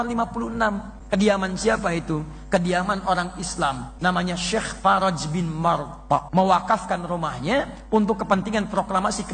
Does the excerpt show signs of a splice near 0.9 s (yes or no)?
yes